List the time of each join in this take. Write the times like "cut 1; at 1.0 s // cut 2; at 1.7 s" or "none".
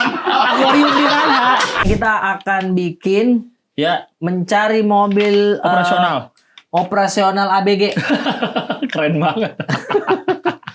cut 1; at 1.9 s